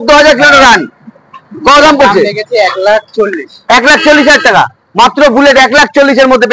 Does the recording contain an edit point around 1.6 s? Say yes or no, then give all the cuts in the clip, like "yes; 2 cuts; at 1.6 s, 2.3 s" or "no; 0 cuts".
no; 0 cuts